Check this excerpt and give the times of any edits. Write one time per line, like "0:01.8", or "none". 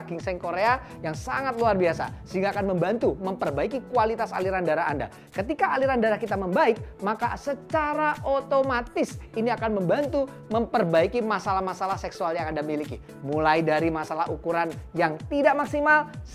none